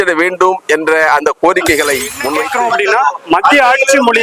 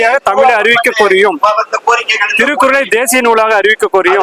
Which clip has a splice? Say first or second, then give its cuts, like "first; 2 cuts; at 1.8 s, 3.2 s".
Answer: first; 1 cut; at 2.2 s